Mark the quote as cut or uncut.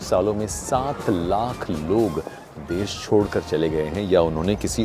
uncut